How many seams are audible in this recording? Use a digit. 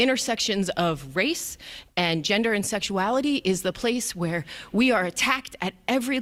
0